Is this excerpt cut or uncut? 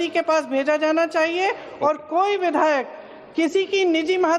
cut